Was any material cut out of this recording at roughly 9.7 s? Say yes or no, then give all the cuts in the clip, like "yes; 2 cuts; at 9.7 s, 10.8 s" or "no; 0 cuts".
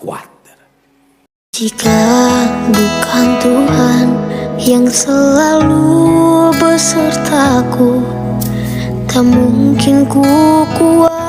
no; 1 cut; at 1.3 s